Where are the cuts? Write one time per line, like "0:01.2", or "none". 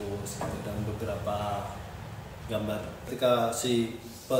0:03.1